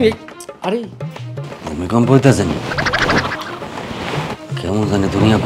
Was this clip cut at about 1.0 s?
yes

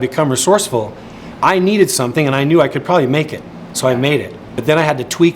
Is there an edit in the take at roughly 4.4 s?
yes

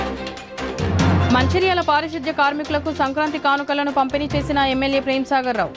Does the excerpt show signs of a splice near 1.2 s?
yes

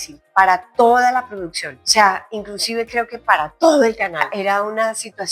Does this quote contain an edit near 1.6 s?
no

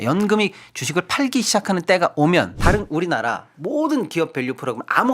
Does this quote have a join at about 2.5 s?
yes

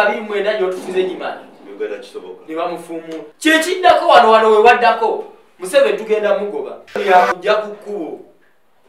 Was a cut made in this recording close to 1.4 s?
no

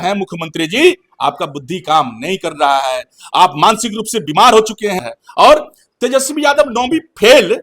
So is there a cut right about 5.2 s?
yes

